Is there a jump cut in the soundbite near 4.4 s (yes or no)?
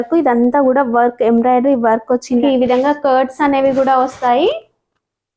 no